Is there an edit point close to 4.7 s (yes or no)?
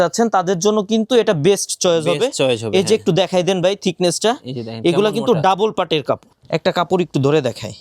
no